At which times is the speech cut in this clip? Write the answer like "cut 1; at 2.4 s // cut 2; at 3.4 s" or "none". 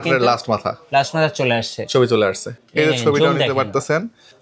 cut 1; at 2.5 s